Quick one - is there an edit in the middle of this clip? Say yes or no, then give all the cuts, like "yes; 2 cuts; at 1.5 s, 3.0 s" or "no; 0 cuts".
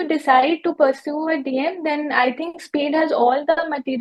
no; 0 cuts